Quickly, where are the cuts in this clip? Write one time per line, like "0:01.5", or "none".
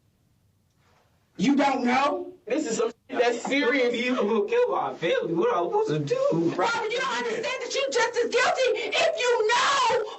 0:02.5
0:06.5